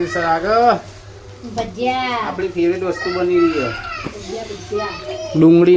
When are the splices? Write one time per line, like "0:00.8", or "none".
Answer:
none